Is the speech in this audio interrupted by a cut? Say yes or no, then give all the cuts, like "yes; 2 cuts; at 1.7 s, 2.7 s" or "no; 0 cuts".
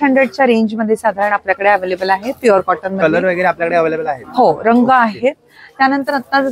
no; 0 cuts